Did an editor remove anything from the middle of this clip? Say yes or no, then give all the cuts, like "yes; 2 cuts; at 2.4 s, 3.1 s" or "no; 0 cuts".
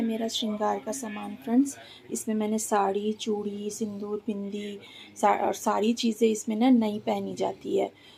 no; 0 cuts